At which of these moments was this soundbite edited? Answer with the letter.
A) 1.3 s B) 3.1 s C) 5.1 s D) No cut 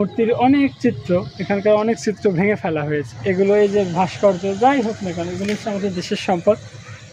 B